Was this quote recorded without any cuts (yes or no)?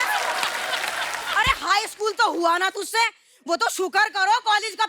no